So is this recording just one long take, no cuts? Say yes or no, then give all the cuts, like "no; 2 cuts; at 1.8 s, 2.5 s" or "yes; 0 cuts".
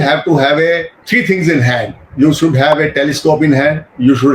no; 1 cut; at 1.0 s